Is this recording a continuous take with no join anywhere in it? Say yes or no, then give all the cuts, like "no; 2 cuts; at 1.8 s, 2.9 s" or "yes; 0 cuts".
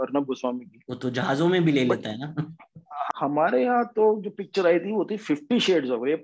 no; 1 cut; at 3.1 s